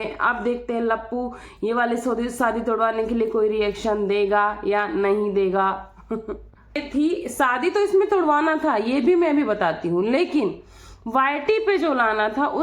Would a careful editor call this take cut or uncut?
cut